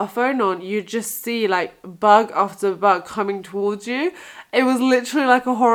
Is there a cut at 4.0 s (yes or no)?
no